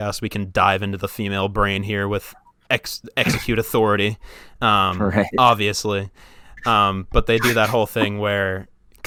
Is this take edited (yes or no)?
no